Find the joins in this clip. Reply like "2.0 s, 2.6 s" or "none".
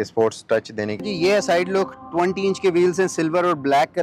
1.0 s